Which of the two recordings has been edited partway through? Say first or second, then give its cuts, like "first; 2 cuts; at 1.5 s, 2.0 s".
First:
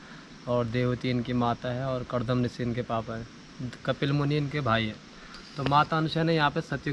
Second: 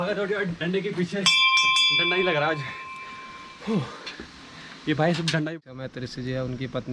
second; 1 cut; at 5.4 s